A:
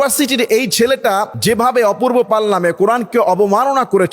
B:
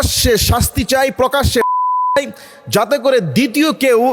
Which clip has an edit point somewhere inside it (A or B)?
A